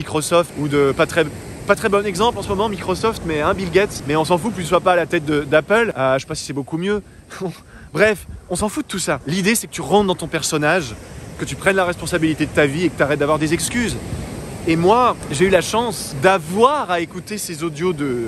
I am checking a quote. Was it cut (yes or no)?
no